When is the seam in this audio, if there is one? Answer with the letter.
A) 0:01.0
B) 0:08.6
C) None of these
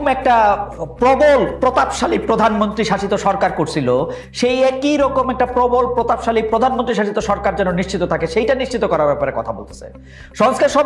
C